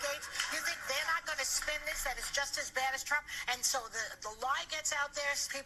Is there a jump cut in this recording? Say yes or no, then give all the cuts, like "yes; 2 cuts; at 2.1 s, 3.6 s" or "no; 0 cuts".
no; 0 cuts